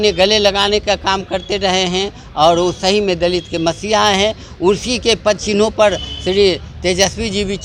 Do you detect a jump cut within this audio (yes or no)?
no